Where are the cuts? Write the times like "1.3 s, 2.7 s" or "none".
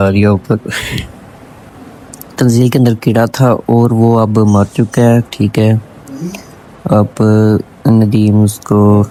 none